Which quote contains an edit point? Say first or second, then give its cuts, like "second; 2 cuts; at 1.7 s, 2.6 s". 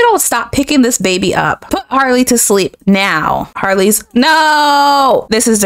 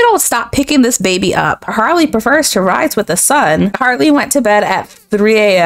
second; 2 cuts; at 1.7 s, 3.7 s